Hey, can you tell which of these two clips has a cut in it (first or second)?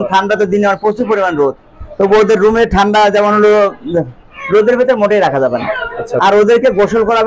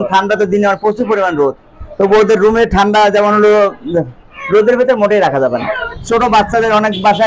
second